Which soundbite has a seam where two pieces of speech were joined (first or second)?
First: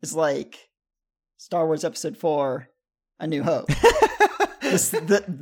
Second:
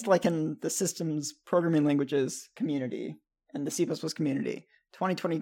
second